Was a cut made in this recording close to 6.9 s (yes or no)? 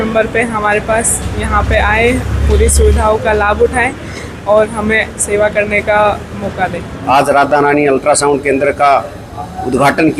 yes